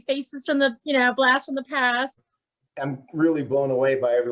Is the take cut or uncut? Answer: cut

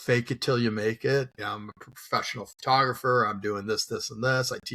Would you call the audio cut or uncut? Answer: cut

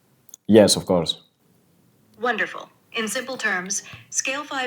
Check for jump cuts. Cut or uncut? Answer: uncut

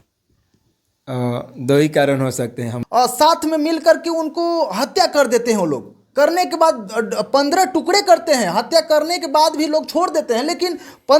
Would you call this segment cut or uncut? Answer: cut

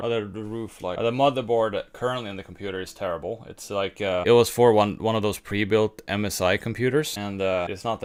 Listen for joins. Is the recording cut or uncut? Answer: uncut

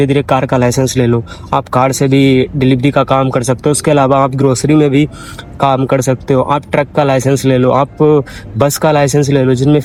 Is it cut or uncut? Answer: uncut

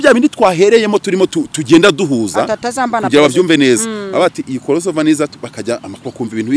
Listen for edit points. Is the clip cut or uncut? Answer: uncut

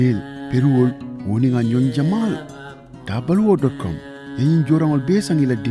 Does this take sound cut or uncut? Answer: uncut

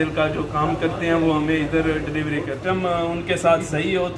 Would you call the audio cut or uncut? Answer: cut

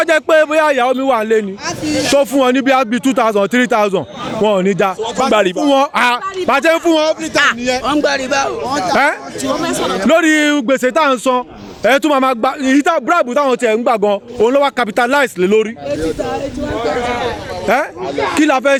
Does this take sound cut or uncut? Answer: uncut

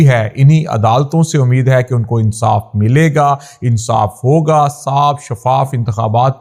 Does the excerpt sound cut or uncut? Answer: uncut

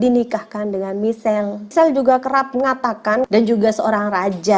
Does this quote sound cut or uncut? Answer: cut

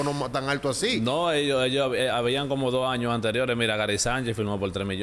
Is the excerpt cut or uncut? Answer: uncut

